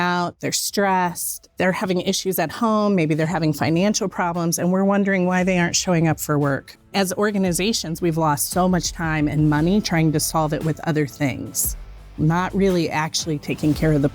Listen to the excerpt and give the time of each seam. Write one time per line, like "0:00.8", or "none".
0:01.4
0:06.9
0:12.1